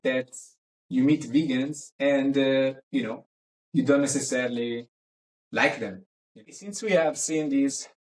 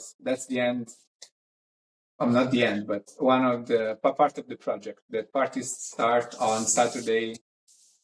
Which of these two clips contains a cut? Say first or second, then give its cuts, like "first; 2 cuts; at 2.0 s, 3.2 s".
first; 1 cut; at 6.5 s